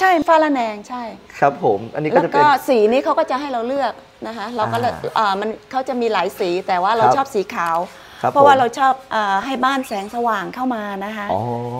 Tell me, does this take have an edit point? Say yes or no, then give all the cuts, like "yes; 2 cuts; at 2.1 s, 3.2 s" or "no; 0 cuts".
no; 0 cuts